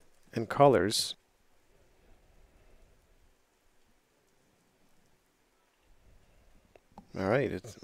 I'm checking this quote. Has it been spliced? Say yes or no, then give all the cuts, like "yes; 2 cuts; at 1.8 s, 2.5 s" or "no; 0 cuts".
no; 0 cuts